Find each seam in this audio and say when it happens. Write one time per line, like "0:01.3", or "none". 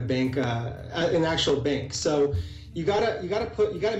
none

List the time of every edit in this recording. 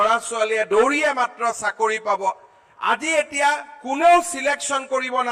none

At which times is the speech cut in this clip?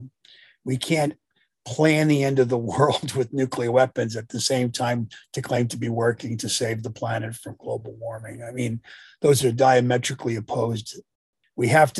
0:11.0

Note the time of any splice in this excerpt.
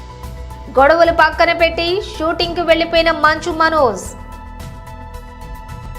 none

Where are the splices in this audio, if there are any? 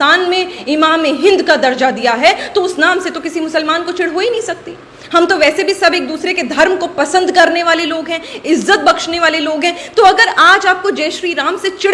none

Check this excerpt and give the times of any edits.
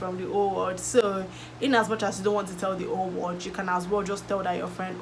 none

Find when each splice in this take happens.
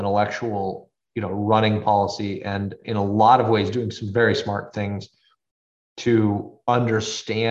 0:01.0
0:02.8

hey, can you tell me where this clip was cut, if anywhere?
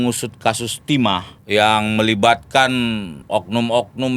0:01.3
0:03.1

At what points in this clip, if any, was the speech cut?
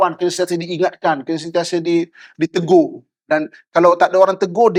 none

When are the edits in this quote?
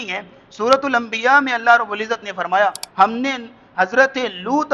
0:02.8

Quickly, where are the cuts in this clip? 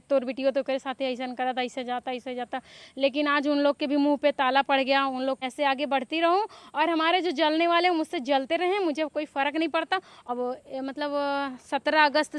0:05.4
0:10.1

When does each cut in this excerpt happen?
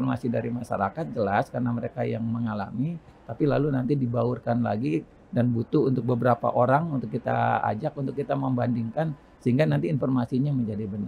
none

